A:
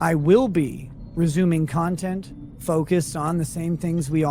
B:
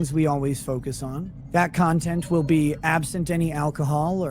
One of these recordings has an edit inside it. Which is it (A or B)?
B